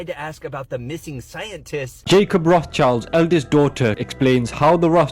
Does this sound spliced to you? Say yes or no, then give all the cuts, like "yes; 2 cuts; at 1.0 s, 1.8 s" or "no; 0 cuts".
yes; 1 cut; at 2.0 s